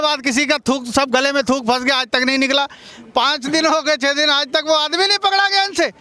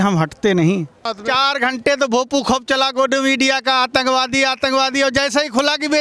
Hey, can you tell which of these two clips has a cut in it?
second; 1 cut; at 1.2 s

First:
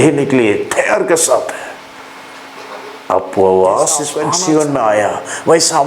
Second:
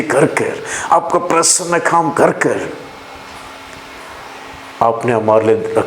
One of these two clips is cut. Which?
first; 1 cut; at 4.2 s

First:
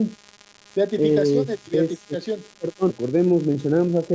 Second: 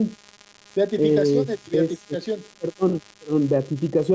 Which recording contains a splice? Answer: second; 1 cut; at 3.0 s

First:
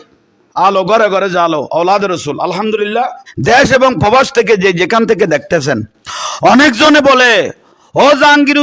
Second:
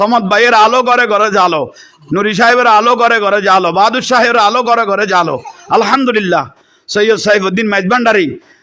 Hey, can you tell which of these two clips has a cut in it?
first; 1 cut; at 3.2 s

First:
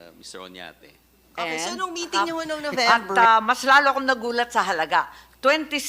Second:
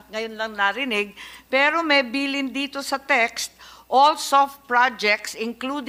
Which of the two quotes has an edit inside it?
first; 1 cut; at 2.9 s

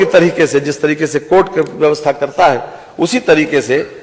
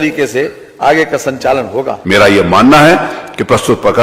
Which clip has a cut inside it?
second; 1 cut; at 2.0 s

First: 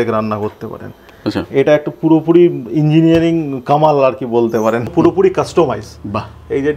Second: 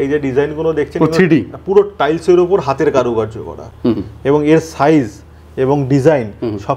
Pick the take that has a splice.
first; 1 cut; at 4.9 s

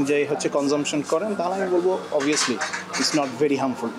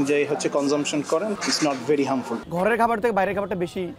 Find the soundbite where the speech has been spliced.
second; 2 cuts; at 1.3 s, 2.4 s

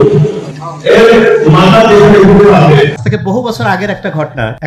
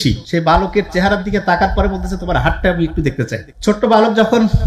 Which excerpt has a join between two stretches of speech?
first; 1 cut; at 3.1 s

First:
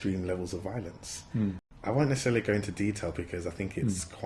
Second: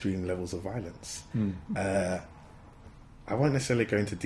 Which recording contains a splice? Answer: first; 1 cut; at 1.6 s

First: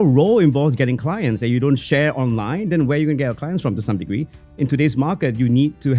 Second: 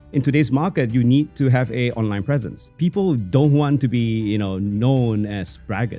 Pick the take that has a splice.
second; 1 cut; at 2.7 s

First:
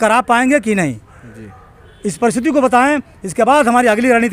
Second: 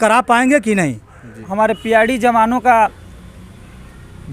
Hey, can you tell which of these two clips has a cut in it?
second; 1 cut; at 1.4 s

